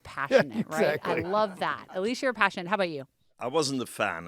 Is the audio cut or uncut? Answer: cut